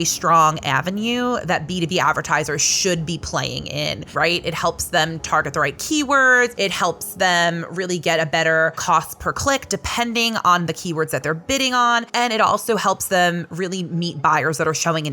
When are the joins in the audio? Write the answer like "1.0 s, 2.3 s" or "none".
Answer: 4.0 s, 6.5 s, 8.8 s, 12.1 s